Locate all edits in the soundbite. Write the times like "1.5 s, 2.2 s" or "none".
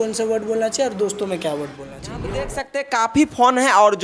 2.2 s